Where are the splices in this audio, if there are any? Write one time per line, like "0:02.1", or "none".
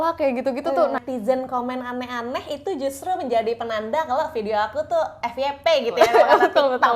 0:01.0